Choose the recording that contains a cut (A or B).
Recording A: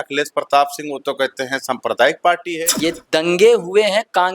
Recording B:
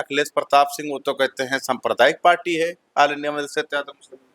A